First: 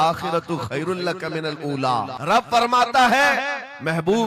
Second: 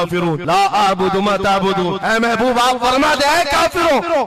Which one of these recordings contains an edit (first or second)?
first